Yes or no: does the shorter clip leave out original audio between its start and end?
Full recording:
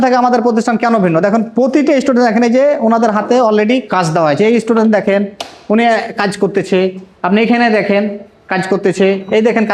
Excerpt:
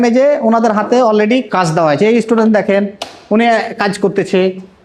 no